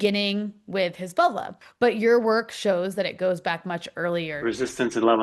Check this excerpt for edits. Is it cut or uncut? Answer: cut